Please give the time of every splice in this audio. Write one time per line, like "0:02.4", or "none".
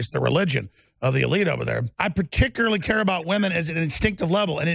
0:01.9